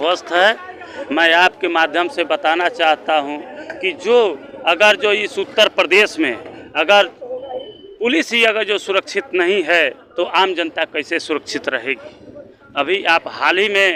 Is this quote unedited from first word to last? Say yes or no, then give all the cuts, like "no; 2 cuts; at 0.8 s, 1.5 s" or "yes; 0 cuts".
yes; 0 cuts